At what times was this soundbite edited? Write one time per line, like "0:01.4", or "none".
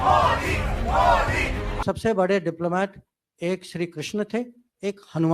0:01.8